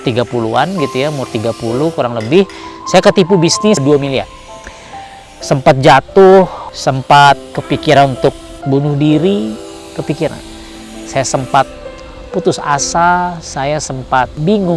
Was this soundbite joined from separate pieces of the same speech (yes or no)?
no